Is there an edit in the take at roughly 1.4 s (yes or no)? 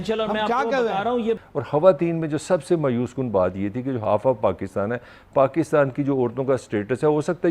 yes